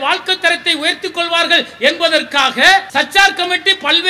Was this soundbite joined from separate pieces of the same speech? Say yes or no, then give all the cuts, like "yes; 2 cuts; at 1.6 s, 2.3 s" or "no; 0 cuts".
yes; 1 cut; at 2.9 s